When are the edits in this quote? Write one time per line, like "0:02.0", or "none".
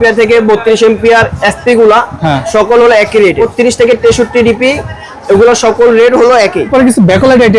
0:03.4
0:06.7